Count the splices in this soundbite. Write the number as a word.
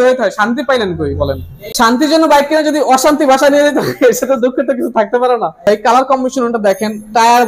two